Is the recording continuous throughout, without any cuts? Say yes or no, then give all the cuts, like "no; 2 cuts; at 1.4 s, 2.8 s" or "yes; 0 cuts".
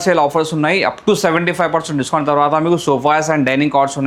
yes; 0 cuts